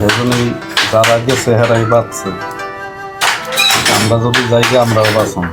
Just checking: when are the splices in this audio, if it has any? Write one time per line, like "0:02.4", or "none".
none